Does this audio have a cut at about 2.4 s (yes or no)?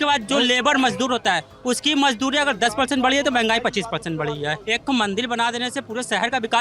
no